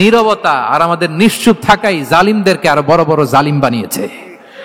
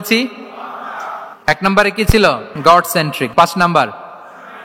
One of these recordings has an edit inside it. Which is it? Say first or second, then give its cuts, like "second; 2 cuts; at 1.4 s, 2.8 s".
second; 2 cuts; at 2.5 s, 3.3 s